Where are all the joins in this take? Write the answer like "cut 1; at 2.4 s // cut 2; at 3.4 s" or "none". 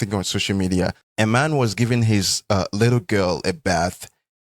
cut 1; at 1.0 s